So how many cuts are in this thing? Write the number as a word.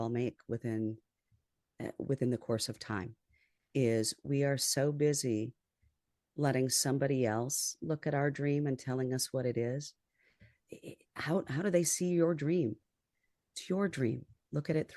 zero